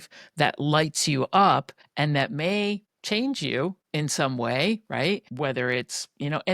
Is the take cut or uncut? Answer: cut